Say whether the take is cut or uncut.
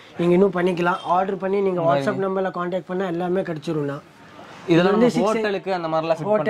uncut